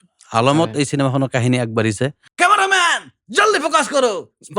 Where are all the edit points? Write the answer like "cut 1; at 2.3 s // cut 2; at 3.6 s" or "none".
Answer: cut 1; at 2.2 s